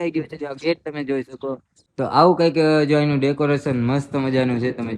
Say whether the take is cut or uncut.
cut